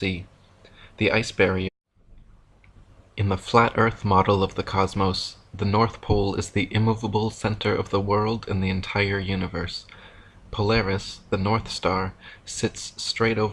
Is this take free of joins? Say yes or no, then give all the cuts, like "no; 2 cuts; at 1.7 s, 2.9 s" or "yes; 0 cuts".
yes; 0 cuts